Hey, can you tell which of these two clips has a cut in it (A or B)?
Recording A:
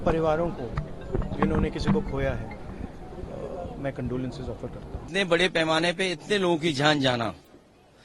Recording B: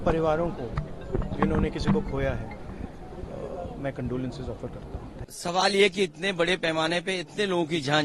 A